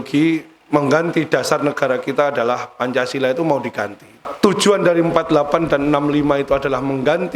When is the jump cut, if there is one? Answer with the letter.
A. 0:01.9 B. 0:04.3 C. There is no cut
B